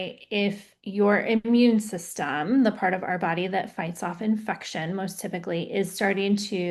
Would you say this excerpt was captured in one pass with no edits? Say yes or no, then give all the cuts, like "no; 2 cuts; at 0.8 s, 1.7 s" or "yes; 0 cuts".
yes; 0 cuts